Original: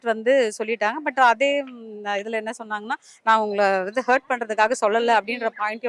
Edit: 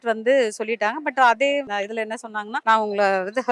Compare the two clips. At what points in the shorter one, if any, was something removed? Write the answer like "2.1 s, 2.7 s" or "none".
1.9 s